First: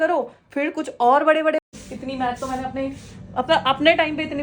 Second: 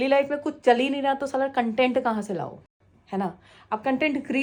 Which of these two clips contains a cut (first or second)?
first